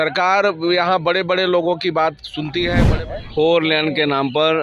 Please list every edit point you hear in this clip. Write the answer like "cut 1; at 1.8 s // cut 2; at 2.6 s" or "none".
cut 1; at 2.8 s